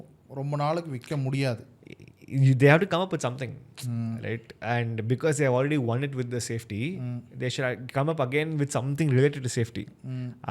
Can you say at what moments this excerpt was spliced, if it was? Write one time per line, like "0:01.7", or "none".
none